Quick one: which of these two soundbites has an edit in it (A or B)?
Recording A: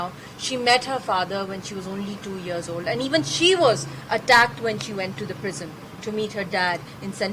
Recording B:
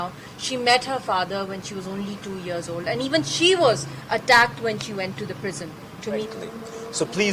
B